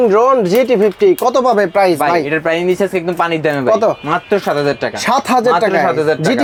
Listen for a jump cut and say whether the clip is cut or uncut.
uncut